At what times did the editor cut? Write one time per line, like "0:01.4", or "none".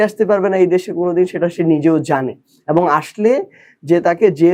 none